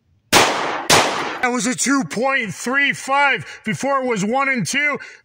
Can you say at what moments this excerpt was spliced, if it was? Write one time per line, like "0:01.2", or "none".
0:01.4